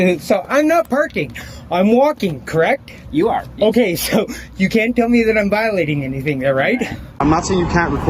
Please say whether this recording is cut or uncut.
cut